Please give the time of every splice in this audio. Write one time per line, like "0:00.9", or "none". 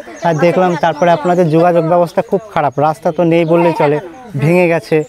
none